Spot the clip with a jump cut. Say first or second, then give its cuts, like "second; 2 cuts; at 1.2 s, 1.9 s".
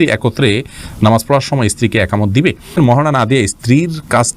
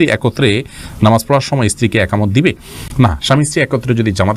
first; 1 cut; at 2.8 s